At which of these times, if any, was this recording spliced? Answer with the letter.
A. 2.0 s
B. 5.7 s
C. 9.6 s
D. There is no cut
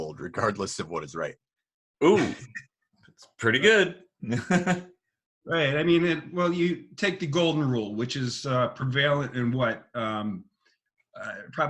D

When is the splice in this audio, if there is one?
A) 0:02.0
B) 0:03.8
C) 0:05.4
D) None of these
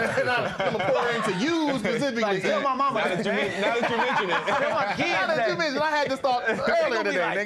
D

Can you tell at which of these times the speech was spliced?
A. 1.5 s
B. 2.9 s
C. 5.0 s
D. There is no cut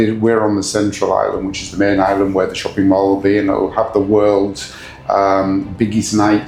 D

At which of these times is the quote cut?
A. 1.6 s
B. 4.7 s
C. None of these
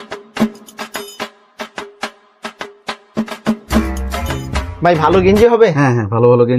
C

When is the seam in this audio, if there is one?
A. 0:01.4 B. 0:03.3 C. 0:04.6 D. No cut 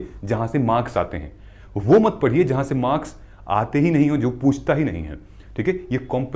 D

